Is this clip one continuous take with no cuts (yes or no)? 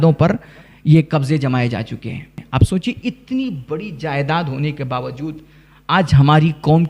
no